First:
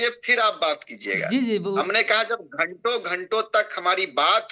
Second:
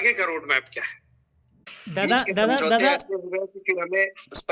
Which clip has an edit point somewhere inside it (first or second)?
second